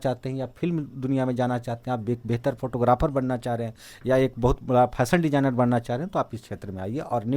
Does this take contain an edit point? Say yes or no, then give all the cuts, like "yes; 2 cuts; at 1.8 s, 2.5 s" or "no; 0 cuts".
no; 0 cuts